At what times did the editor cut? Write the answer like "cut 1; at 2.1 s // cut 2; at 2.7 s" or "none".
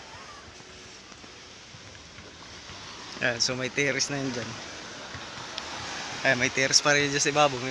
none